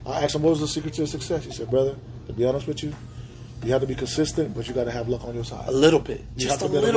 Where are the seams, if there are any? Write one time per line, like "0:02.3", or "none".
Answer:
none

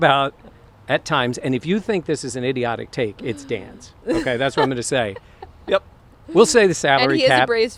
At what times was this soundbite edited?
none

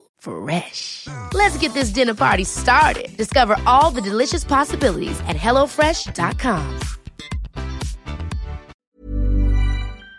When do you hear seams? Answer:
0:08.8

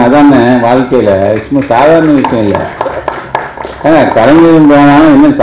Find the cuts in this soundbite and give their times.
none

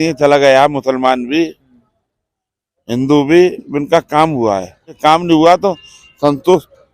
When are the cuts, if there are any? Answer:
0:05.0

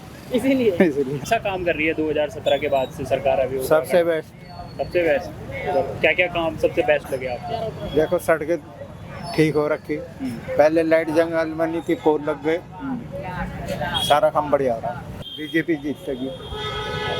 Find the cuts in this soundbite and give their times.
0:01.2
0:15.2

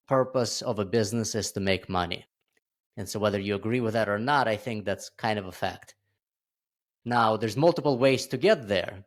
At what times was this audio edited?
none

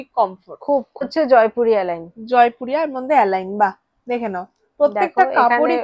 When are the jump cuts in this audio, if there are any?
0:01.0

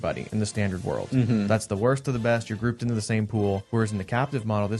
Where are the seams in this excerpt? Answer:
0:03.6

